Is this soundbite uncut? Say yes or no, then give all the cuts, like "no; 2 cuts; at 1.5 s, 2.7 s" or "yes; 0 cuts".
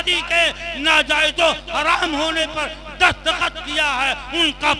yes; 0 cuts